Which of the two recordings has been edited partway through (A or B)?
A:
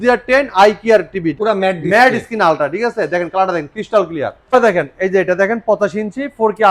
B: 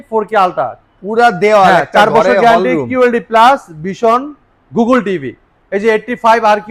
A